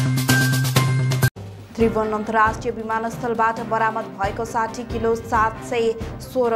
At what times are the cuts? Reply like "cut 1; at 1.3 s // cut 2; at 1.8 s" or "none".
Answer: none